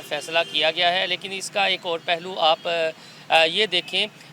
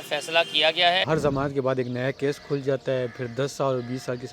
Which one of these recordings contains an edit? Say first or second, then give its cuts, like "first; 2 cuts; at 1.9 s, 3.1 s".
second; 1 cut; at 1.0 s